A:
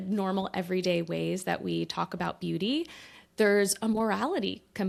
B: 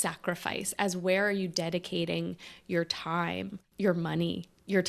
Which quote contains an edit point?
B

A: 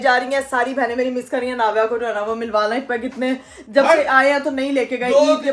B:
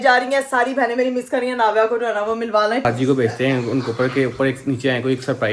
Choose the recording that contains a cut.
B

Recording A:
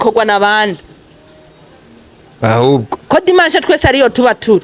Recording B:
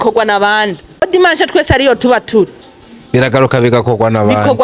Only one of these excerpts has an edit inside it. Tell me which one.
B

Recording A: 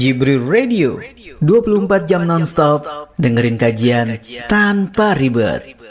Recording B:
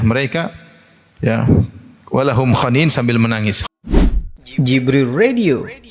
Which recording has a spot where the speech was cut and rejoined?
B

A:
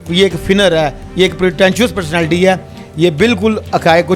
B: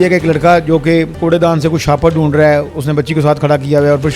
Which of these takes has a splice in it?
B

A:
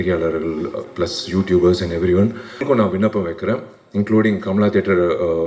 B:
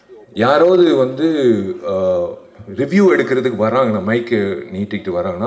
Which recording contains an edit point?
A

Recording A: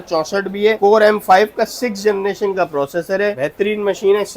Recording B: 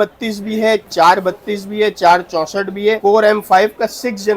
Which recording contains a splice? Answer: A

